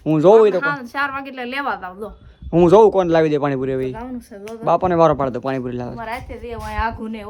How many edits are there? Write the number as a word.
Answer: zero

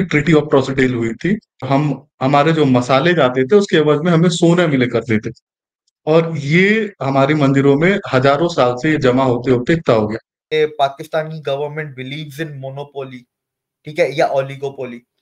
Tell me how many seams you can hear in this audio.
two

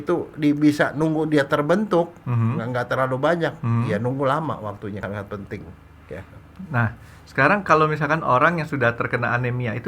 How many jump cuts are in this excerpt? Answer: one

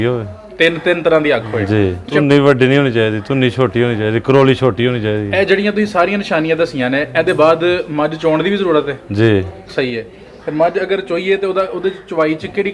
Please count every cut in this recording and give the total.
one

